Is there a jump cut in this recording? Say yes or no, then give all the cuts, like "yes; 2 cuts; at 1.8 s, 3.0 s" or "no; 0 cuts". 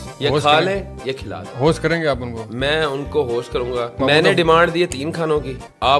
no; 0 cuts